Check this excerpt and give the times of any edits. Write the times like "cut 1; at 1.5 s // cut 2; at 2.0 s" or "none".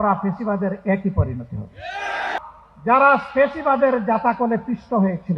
cut 1; at 2.3 s